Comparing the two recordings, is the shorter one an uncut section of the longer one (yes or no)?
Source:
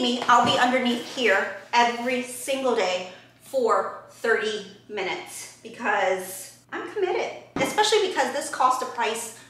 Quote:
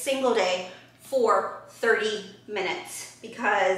yes